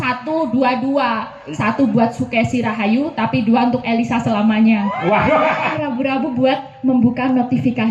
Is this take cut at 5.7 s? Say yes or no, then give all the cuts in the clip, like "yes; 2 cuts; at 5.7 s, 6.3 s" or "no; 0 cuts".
yes; 1 cut; at 5.7 s